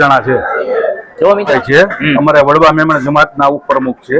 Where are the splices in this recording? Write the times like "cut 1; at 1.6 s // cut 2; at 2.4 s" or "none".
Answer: cut 1; at 1.5 s